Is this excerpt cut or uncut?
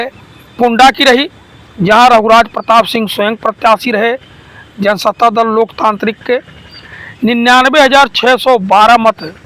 uncut